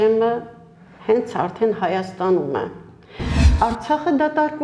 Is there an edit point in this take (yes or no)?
yes